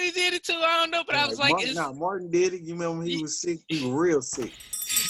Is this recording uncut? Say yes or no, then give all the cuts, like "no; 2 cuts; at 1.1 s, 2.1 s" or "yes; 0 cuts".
yes; 0 cuts